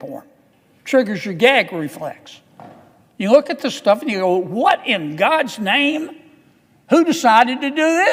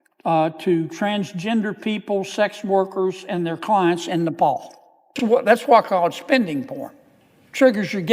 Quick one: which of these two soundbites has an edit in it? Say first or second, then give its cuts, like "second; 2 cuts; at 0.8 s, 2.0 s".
second; 1 cut; at 5.1 s